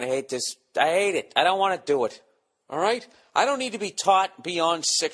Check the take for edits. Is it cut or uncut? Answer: uncut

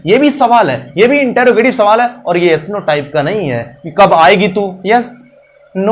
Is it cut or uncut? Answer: uncut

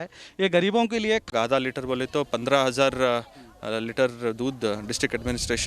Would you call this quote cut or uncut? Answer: cut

